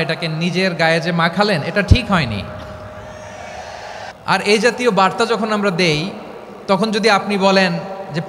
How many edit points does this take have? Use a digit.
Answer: 1